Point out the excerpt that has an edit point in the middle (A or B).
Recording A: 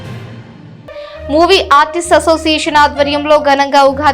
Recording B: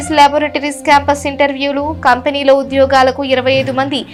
A